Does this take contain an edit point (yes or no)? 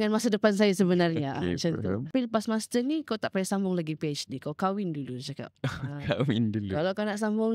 yes